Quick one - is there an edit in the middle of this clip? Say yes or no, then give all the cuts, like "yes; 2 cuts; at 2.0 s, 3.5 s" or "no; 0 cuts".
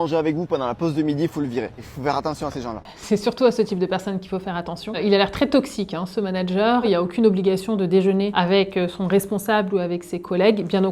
yes; 4 cuts; at 1.8 s, 2.9 s, 6.8 s, 8.3 s